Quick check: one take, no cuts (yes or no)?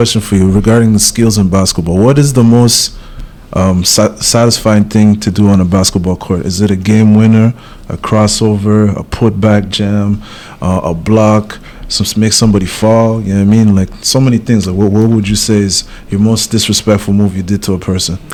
yes